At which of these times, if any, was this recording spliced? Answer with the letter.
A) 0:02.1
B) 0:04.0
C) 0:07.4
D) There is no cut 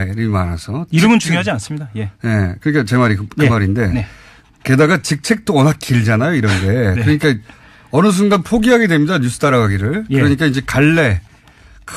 C